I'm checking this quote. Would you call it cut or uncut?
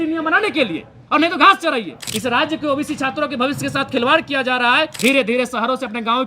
cut